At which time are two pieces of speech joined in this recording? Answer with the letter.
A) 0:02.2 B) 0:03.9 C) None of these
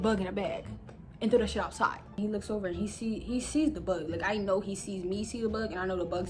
A